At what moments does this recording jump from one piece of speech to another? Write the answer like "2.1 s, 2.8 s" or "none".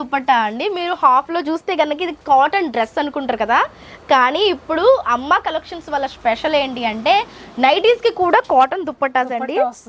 none